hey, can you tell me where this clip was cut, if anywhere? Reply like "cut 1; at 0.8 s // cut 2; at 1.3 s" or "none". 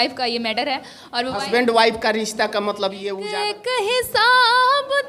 cut 1; at 3.2 s